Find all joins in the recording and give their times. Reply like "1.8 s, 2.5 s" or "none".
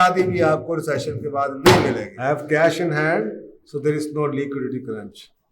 2.1 s